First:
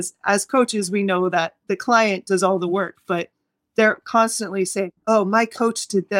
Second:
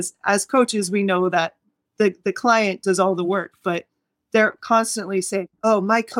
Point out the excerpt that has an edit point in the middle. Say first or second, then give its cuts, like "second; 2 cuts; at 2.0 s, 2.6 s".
first; 1 cut; at 1.6 s